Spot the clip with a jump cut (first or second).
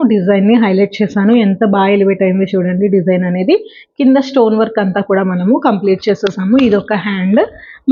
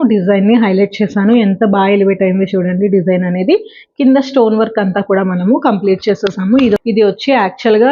second